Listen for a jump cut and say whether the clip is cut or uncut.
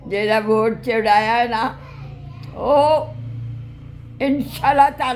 uncut